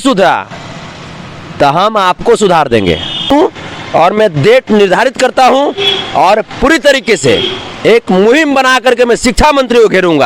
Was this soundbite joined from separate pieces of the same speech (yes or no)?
yes